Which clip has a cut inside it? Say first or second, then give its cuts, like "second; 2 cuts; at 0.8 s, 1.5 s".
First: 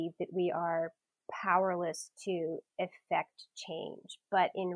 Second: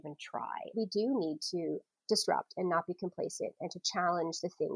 second; 2 cuts; at 0.7 s, 1.9 s